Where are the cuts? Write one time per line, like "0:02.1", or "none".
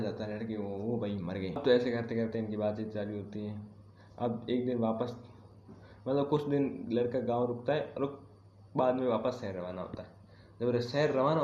0:01.6